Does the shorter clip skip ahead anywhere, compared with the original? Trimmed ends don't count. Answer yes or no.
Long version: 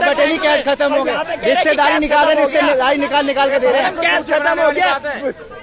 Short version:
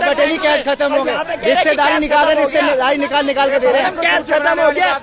no